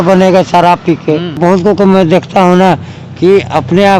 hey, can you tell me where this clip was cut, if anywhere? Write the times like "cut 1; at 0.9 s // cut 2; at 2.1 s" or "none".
cut 1; at 1.4 s